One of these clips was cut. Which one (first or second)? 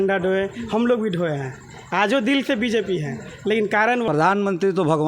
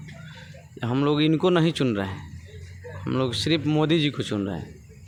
first